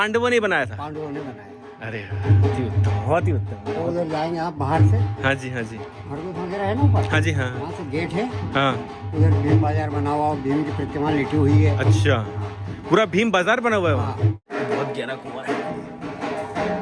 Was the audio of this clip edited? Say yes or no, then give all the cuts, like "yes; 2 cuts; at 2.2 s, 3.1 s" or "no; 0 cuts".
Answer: yes; 1 cut; at 14.4 s